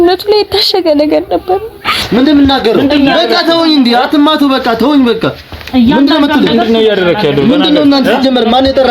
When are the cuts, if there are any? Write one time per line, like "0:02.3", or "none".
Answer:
0:02.0